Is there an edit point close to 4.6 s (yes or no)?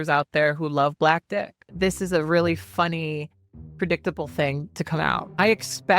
no